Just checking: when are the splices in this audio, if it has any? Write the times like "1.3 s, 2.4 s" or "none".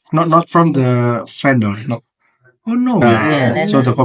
3.0 s